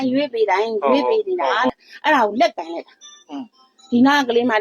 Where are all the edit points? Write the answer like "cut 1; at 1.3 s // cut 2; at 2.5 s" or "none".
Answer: cut 1; at 1.7 s